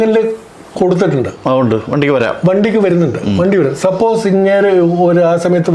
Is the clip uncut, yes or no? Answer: yes